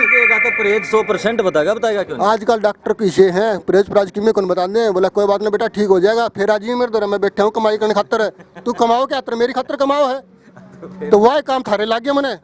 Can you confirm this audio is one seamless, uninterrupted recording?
yes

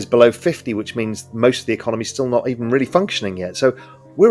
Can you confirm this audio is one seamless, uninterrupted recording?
yes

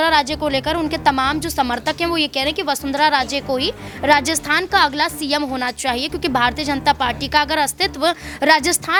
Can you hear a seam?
no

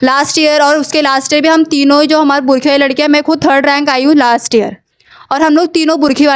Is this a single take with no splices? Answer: yes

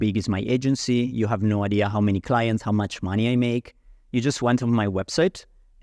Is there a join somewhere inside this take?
no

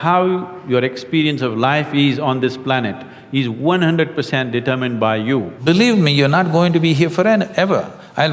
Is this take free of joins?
no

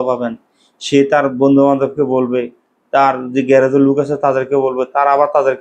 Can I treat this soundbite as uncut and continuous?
yes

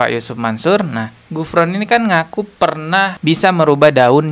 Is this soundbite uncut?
yes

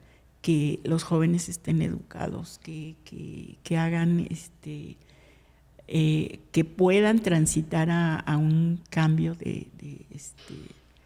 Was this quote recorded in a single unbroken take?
yes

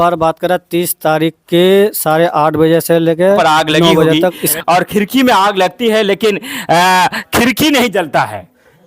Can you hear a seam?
yes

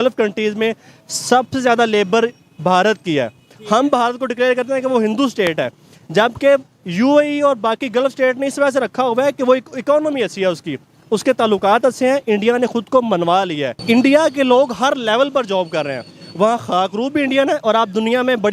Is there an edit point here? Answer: yes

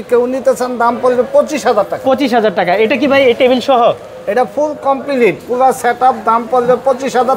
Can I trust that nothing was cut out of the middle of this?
yes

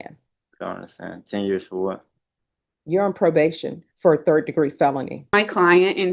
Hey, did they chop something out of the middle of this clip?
yes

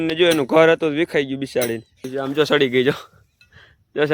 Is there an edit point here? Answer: yes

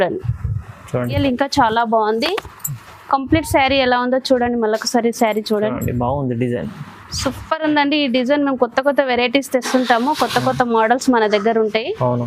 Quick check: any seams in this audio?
yes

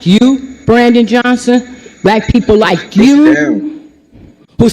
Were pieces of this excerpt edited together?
no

